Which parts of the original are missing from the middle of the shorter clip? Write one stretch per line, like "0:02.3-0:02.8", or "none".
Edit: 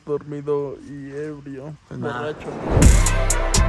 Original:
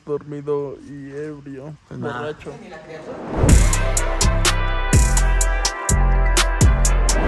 0:02.5-0:03.2